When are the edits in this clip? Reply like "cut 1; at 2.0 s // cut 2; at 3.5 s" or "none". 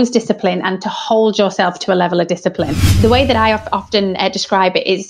cut 1; at 2.8 s